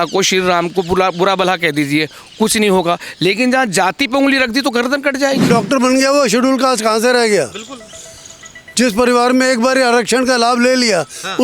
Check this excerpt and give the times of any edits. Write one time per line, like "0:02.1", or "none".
0:05.5